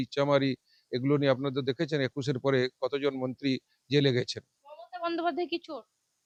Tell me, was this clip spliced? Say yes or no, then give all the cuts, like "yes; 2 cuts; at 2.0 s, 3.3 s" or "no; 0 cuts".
no; 0 cuts